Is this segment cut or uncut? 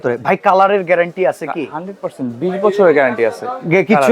uncut